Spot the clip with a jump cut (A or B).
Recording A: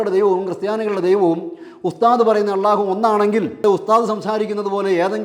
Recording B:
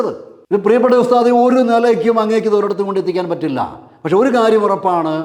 A